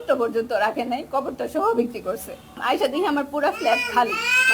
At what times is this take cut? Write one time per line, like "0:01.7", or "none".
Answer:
0:02.6